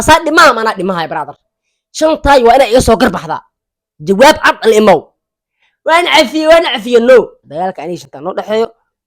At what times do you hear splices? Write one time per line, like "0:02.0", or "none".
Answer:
0:07.4

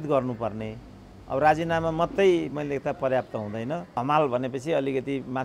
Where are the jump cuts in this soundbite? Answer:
0:04.0

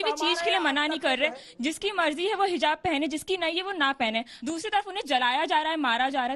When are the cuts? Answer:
0:04.3

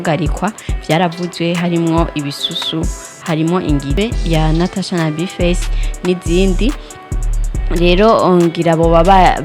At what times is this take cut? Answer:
0:04.0

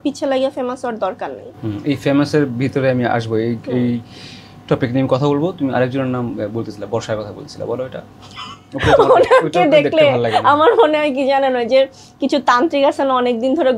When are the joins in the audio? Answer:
none

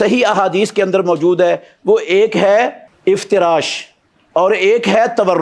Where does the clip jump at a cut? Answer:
0:02.9

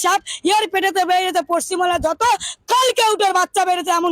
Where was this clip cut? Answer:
none

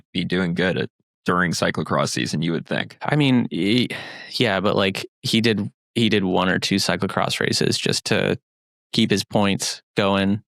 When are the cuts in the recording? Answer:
0:01.0
0:03.0

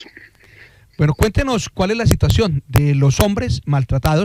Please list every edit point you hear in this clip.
none

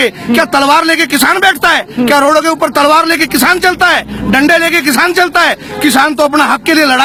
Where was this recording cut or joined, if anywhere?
none

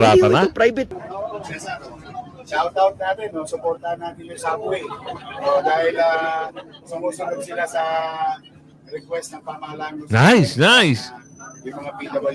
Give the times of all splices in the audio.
0:00.9

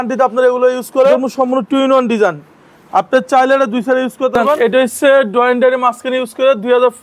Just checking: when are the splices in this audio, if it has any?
0:01.2
0:04.6

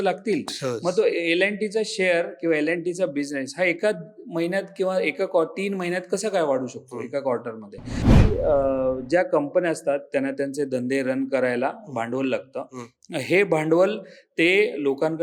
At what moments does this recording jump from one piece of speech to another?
0:08.0

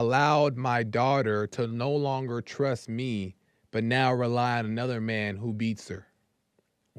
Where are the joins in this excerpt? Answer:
none

